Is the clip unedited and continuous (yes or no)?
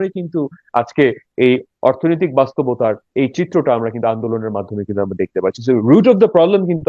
no